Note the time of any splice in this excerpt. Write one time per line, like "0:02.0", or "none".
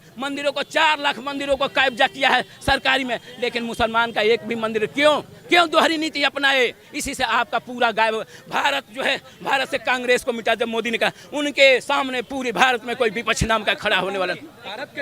none